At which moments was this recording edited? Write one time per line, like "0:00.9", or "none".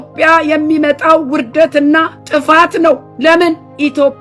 0:02.2
0:03.1